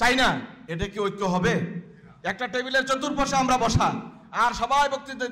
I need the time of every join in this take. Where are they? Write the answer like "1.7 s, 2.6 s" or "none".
none